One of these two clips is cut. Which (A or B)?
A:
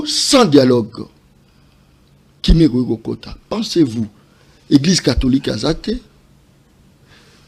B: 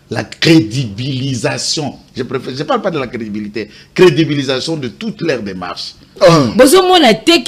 B